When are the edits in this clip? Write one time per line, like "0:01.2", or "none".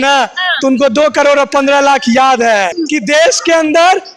0:02.8

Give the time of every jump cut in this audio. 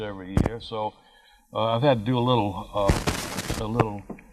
0:01.5

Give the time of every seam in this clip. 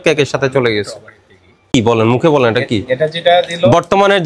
0:01.7

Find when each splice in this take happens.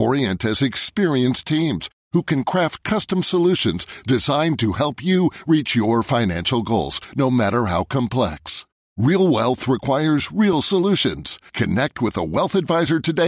none

